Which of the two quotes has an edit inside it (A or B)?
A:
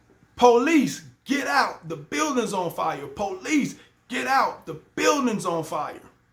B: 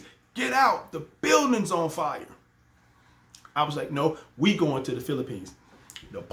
B